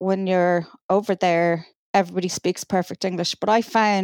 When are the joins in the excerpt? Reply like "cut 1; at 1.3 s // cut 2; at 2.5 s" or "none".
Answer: cut 1; at 1.7 s

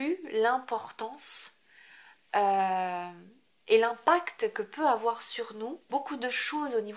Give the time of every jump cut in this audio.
cut 1; at 5.9 s

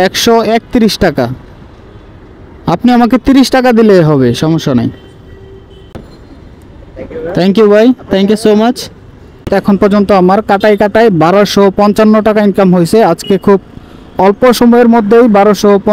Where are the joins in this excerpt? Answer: cut 1; at 5.9 s // cut 2; at 9.5 s

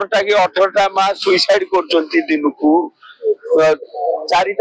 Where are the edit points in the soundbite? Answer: none

